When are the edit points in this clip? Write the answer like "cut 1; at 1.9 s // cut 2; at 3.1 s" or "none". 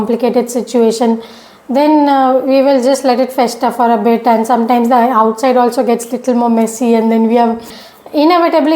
cut 1; at 7.7 s